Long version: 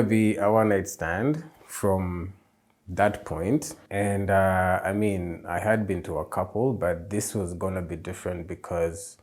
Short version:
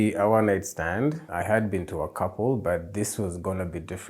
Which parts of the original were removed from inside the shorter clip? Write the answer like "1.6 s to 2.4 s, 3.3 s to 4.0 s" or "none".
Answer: 1.5 s to 5.4 s